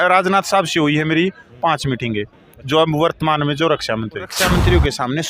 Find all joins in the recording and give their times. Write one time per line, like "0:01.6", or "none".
0:04.4